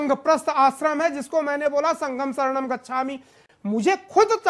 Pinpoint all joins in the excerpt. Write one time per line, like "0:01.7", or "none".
none

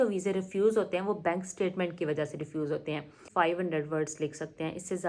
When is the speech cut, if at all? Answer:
0:03.2

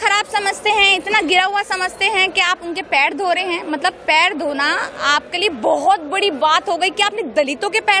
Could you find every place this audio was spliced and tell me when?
none

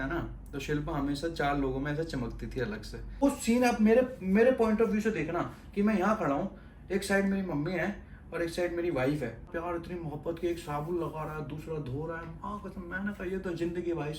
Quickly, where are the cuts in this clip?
0:03.2
0:09.5

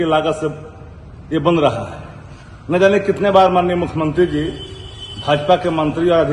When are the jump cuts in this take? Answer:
none

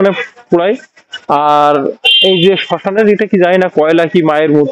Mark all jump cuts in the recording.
none

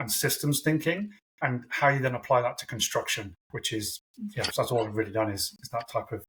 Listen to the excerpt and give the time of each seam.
none

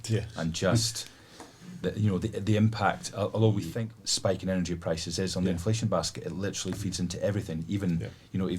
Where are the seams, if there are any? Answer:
0:03.7

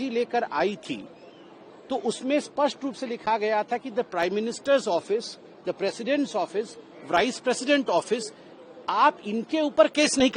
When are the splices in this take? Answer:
none

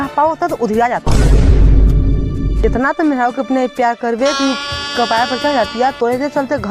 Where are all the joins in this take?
none

